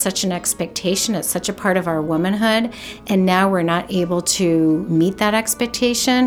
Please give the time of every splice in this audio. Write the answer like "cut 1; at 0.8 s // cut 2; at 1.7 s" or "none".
cut 1; at 4.9 s